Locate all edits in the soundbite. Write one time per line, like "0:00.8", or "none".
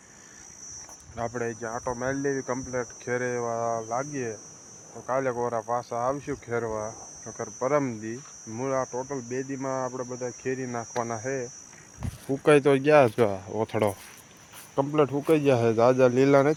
none